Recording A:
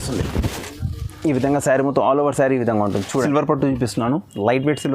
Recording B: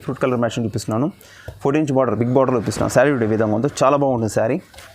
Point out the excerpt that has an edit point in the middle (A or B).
A